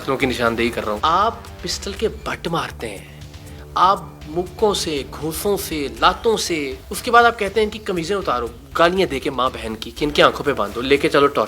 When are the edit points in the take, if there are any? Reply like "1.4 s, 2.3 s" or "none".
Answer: 1.0 s